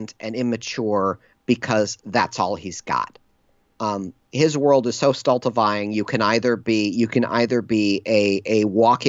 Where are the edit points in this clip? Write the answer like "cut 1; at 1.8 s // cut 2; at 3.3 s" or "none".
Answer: none